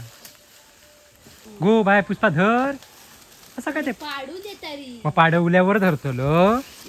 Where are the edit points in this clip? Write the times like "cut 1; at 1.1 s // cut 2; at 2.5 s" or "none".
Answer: cut 1; at 1.4 s